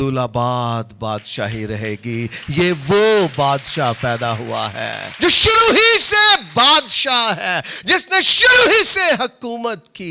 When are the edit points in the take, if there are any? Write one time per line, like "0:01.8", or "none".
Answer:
0:05.0